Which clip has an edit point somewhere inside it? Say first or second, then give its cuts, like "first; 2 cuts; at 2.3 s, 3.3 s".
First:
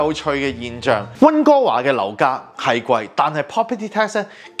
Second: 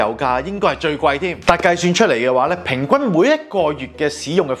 first; 1 cut; at 1.1 s